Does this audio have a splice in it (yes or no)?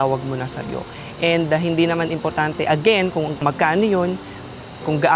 no